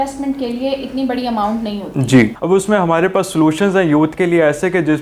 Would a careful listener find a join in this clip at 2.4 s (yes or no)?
yes